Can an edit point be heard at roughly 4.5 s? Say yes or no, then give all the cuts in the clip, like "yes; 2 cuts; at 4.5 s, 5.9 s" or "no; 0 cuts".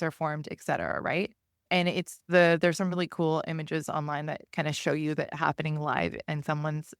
no; 1 cut; at 1.6 s